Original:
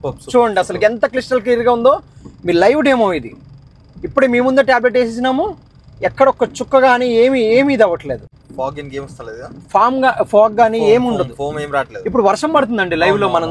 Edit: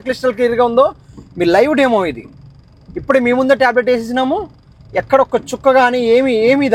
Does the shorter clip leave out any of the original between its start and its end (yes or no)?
no